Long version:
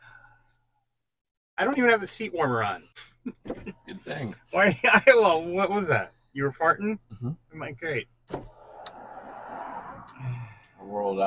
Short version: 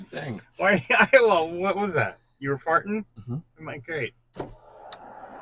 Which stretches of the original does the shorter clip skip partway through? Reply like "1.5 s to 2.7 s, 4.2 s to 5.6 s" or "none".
none